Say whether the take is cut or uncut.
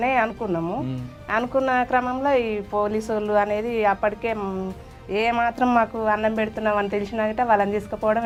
uncut